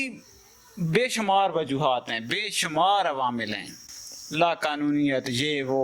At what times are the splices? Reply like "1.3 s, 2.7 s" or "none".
none